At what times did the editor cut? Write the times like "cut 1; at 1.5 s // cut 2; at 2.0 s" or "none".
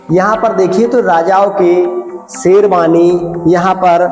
none